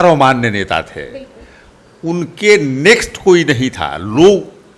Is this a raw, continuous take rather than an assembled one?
yes; 0 cuts

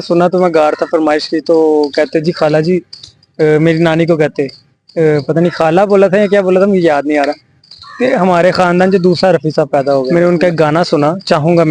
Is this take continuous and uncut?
no; 1 cut; at 10.1 s

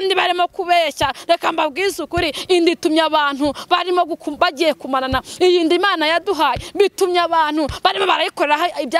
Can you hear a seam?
no; 0 cuts

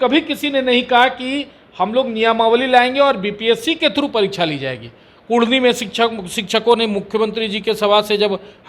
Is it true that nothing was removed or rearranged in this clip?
yes; 0 cuts

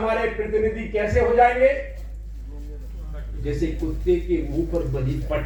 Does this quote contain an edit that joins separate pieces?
no; 0 cuts

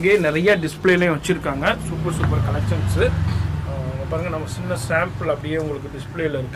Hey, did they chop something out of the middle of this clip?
yes; 1 cut; at 4.0 s

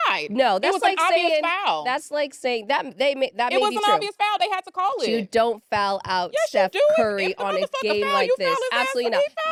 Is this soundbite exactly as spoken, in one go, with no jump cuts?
yes; 0 cuts

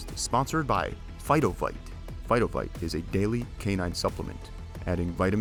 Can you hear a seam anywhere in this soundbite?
no; 0 cuts

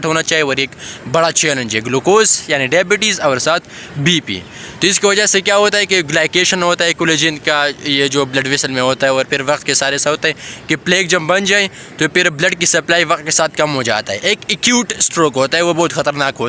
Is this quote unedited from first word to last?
yes; 0 cuts

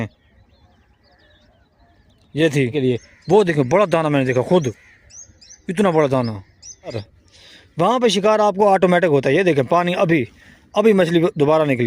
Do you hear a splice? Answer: yes; 2 cuts; at 2.7 s, 6.9 s

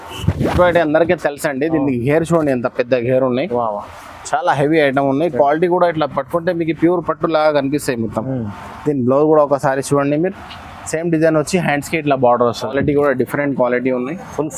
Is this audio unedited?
no; 1 cut; at 12.7 s

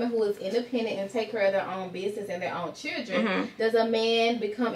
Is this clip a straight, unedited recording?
yes; 0 cuts

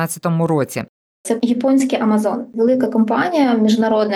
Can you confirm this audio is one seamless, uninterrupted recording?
no; 2 cuts; at 1.1 s, 2.5 s

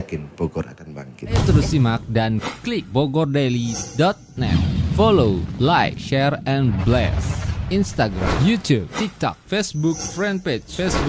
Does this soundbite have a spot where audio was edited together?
yes; 1 cut; at 1.4 s

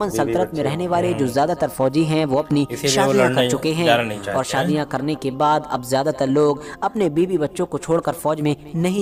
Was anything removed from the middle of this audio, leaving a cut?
no; 0 cuts

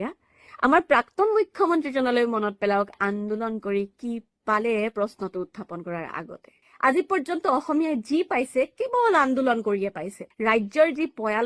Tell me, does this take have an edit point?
yes; 2 cuts; at 6.6 s, 10.3 s

